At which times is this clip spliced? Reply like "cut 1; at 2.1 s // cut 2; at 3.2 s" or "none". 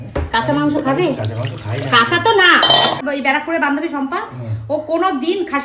cut 1; at 3.0 s